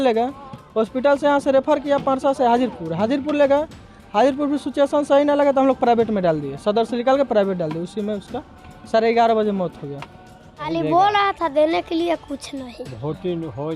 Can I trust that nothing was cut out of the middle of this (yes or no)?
no